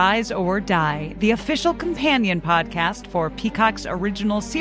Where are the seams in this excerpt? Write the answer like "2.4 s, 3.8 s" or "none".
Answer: none